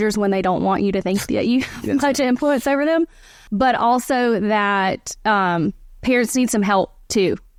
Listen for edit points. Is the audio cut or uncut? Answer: uncut